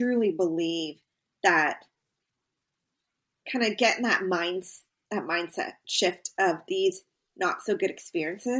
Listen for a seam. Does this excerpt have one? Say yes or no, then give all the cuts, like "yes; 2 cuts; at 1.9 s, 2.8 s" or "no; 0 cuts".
no; 0 cuts